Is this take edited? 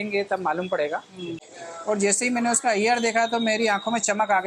yes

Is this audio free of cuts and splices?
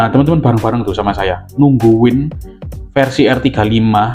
yes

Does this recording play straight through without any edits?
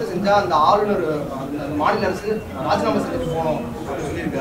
yes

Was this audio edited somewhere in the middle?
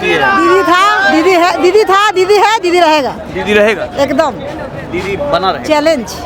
no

